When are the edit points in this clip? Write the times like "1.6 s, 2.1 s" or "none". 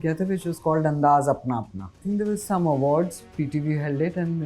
2.0 s